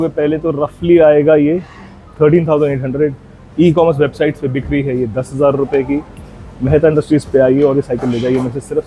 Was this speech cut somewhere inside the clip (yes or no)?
no